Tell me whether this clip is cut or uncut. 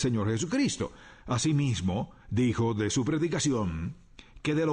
uncut